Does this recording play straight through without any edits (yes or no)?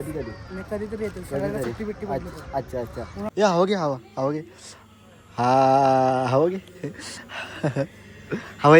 no